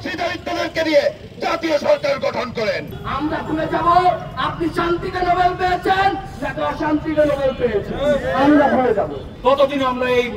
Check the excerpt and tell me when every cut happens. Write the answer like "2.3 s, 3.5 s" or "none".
2.9 s, 9.2 s